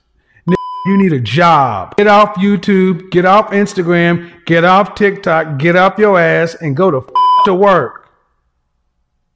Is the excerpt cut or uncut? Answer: uncut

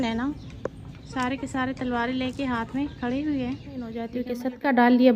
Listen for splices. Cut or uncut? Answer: cut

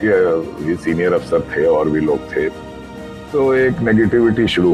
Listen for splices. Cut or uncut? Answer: uncut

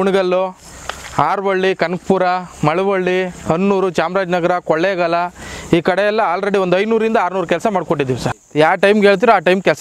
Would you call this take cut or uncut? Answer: cut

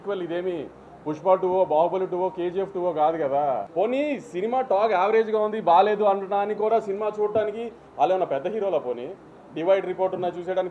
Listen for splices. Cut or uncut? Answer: cut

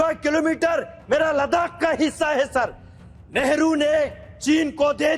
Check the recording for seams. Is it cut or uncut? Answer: uncut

